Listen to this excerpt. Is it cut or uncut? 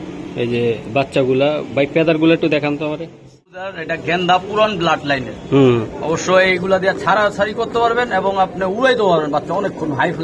cut